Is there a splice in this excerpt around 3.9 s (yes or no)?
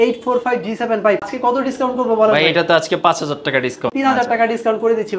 yes